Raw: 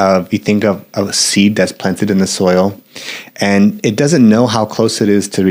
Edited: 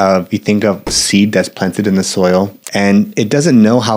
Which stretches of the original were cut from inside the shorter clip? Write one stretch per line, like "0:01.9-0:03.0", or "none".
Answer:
0:00.9-0:01.1
0:02.8-0:03.3